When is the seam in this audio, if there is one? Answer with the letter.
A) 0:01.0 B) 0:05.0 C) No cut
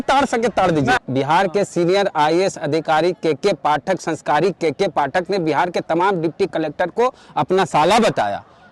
A